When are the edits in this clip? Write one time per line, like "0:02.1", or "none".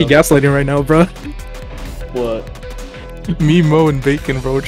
none